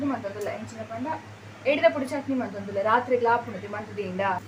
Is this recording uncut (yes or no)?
yes